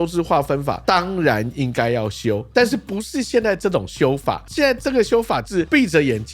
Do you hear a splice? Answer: yes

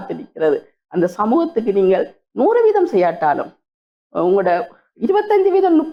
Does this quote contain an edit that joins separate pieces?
no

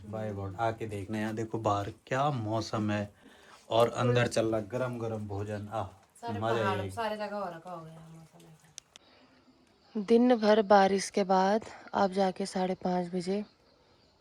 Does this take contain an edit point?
no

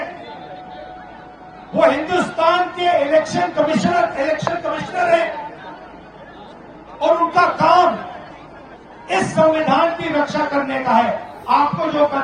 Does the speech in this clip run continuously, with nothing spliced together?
no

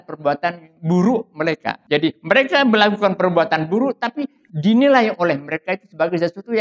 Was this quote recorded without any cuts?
no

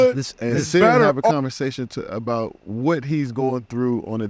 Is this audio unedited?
no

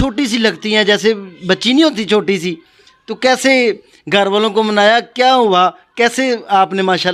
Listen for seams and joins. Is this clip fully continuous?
yes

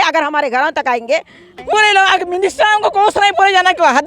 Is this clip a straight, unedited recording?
no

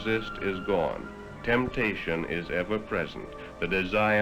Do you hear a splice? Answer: no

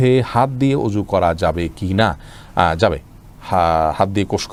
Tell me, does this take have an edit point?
no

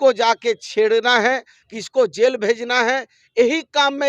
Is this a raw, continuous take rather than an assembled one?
yes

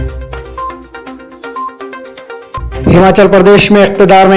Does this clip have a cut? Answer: yes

